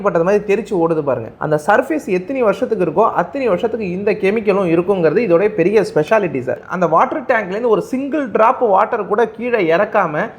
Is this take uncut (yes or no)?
no